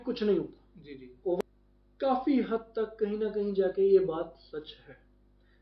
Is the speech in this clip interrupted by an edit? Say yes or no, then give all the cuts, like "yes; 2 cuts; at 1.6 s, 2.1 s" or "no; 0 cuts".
yes; 1 cut; at 1.4 s